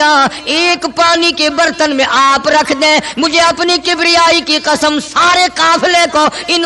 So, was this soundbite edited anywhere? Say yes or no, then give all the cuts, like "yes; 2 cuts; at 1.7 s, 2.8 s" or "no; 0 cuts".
no; 0 cuts